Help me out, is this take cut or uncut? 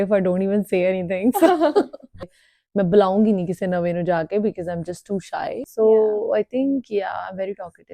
cut